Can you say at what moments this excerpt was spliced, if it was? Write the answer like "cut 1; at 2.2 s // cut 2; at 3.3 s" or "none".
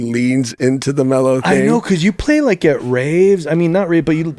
none